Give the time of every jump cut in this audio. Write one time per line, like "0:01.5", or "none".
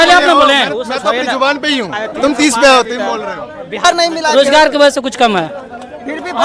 0:03.8